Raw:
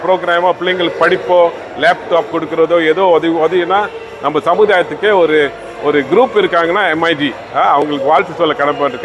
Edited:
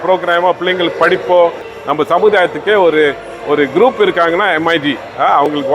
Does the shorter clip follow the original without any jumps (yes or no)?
no